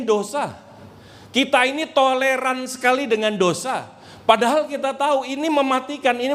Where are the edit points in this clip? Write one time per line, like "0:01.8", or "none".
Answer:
none